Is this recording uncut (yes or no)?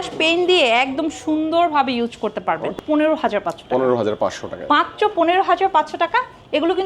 no